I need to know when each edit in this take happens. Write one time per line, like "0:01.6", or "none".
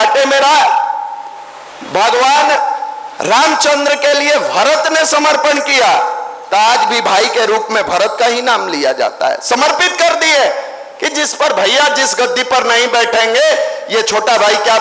none